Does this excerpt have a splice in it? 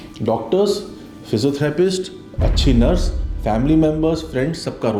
no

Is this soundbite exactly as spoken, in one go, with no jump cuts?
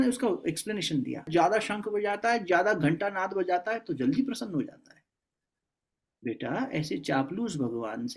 no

